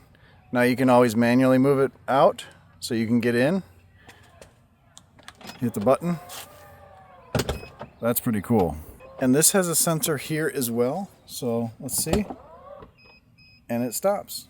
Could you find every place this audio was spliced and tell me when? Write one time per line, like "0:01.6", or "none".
0:09.0